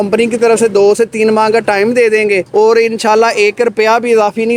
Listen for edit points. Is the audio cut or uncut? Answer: uncut